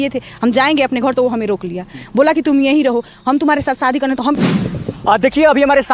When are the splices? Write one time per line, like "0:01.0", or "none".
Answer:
0:04.4